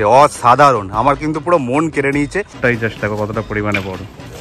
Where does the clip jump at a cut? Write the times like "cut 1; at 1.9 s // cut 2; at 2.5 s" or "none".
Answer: cut 1; at 2.5 s